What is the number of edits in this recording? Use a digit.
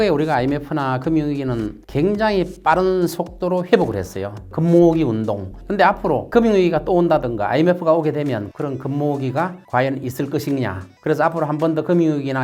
4